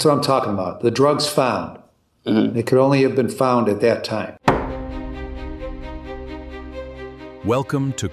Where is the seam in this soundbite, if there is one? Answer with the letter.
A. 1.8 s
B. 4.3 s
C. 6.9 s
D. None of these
B